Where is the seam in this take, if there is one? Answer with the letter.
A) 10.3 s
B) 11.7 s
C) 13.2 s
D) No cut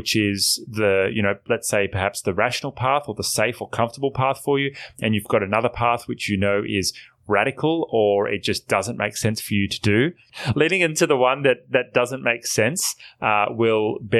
A